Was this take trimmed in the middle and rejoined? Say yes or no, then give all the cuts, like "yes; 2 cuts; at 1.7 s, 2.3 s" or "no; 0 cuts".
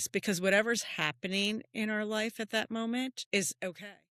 yes; 1 cut; at 3.2 s